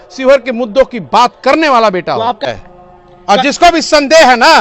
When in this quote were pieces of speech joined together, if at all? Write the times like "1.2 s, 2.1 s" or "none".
2.4 s